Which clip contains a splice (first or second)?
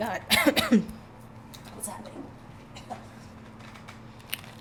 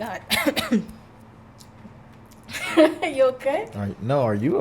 second